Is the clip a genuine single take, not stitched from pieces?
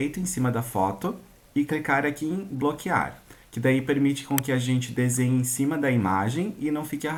yes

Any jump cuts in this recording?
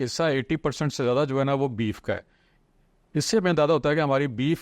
no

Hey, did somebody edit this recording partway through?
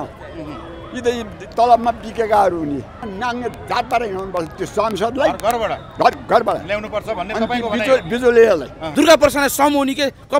yes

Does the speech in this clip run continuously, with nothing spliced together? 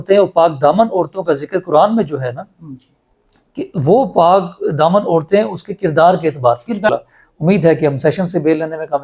no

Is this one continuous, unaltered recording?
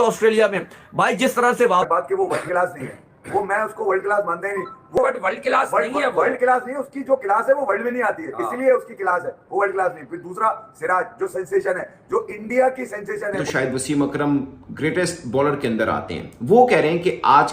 no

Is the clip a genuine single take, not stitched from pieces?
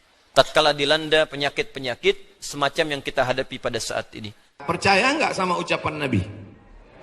no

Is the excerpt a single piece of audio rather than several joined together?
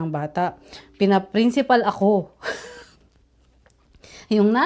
yes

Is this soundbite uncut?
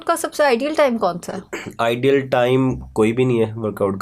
yes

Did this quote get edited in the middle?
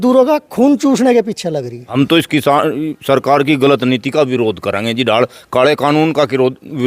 yes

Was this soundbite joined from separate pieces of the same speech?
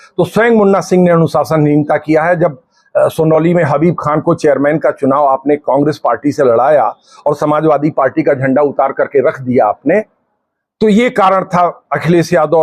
no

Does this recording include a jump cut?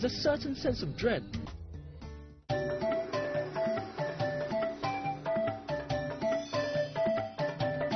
no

